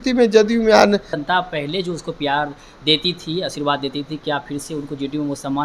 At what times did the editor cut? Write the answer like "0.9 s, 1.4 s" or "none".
1.2 s